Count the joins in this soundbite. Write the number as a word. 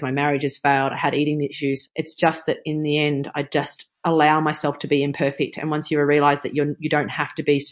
two